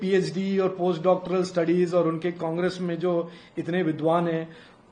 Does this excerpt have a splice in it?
no; 0 cuts

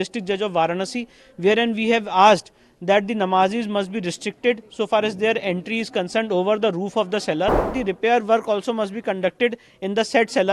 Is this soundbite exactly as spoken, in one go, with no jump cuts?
no; 1 cut; at 7.7 s

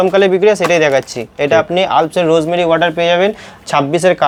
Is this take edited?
no; 0 cuts

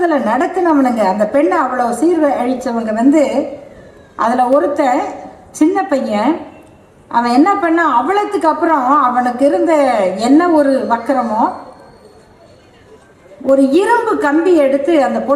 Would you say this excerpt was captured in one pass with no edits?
yes; 0 cuts

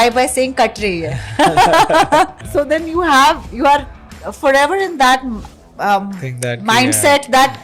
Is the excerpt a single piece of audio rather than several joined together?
no; 1 cut; at 2.4 s

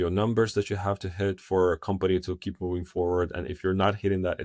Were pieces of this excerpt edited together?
no; 0 cuts

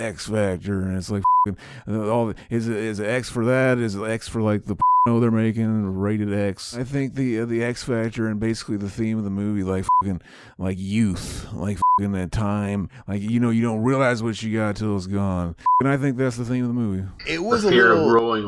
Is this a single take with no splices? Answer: no; 4 cuts; at 6.8 s, 13.0 s, 15.8 s, 17.1 s

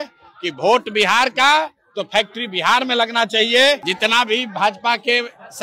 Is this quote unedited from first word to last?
no; 1 cut; at 3.9 s

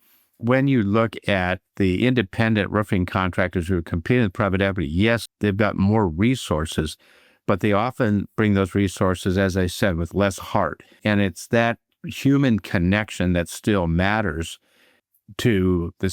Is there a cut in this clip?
yes; 2 cuts; at 5.3 s, 11.0 s

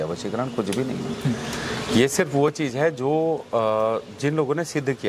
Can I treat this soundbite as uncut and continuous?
yes; 0 cuts

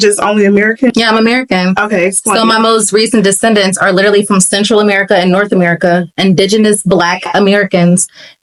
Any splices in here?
no; 0 cuts

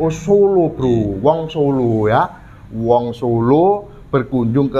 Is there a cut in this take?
no; 0 cuts

